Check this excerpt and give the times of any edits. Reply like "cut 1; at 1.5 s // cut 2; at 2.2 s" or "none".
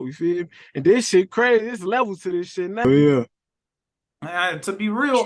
cut 1; at 2.8 s